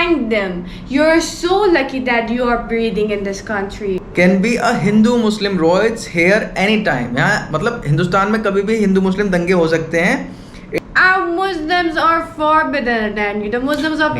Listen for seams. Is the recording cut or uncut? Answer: cut